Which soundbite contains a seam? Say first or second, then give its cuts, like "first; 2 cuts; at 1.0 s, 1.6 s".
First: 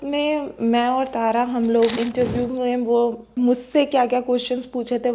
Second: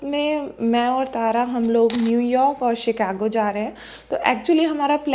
first; 2 cuts; at 2.0 s, 3.3 s